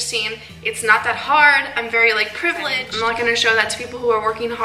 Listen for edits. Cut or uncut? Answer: cut